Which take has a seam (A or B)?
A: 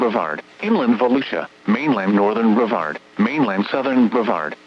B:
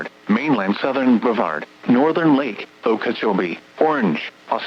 A